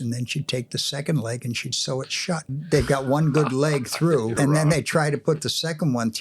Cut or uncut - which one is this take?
cut